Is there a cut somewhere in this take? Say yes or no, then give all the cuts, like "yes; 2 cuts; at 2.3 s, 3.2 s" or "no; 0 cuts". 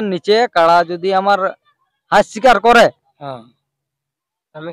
no; 0 cuts